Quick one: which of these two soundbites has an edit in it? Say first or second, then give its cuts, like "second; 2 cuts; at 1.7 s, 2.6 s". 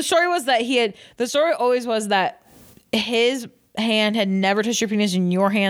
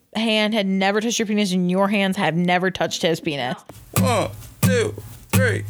second; 1 cut; at 3.4 s